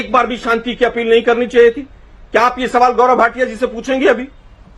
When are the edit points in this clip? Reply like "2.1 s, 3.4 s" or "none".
none

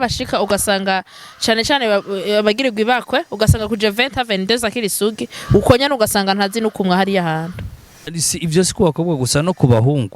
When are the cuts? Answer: 8.1 s

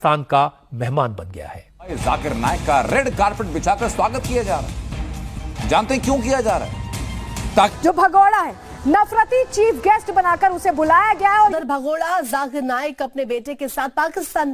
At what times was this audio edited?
2.0 s, 7.7 s, 11.6 s

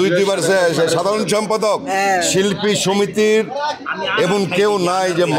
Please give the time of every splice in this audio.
none

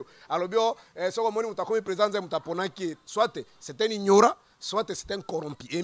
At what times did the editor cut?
none

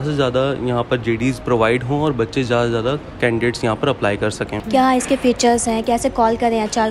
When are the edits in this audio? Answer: 4.5 s

